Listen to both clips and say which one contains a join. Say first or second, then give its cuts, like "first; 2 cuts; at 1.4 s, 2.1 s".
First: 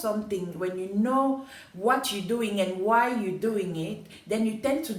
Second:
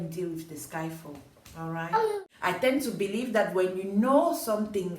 second; 1 cut; at 2.2 s